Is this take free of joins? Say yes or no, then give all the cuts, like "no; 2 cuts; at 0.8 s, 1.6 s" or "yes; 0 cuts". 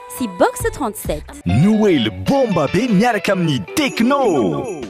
no; 1 cut; at 1.3 s